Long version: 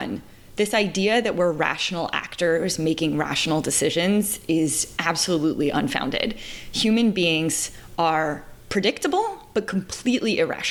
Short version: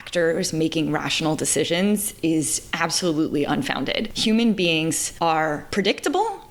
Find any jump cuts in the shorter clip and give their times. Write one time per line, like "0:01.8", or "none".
0:04.1
0:05.4